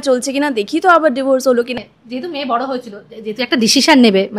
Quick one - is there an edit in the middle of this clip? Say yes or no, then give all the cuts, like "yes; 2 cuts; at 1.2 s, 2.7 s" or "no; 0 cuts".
yes; 1 cut; at 1.8 s